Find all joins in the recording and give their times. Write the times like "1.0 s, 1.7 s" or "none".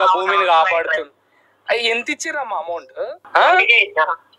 3.2 s